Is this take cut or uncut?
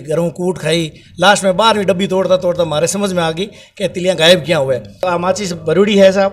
cut